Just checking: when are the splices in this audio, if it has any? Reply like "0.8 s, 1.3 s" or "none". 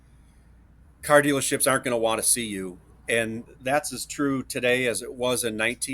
3.4 s